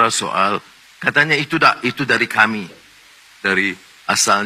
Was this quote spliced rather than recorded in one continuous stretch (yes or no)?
no